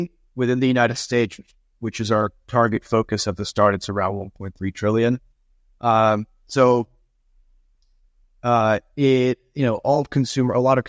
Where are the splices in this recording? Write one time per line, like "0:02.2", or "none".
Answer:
none